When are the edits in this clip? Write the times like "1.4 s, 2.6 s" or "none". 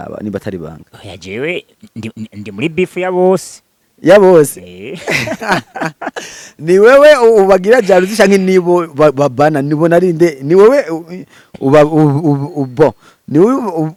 none